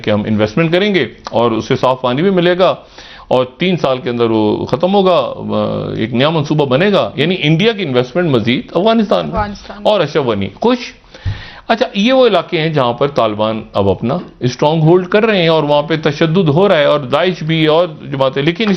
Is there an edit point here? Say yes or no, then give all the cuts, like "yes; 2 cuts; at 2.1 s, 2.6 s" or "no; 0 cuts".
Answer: no; 0 cuts